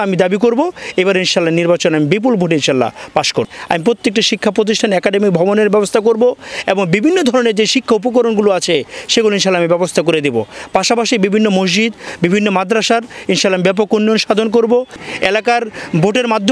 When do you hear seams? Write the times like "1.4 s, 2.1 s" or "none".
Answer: 3.4 s, 15.0 s